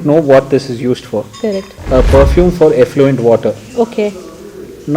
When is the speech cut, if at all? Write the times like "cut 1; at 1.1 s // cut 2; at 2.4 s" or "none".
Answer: cut 1; at 1.7 s